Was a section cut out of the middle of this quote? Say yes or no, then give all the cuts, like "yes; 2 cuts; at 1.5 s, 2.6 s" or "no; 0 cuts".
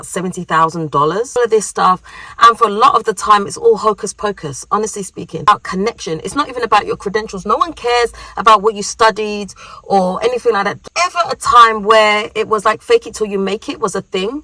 yes; 3 cuts; at 1.4 s, 5.5 s, 10.8 s